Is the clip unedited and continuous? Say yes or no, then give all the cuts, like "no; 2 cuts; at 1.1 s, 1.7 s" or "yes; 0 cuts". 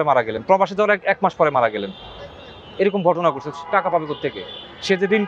yes; 0 cuts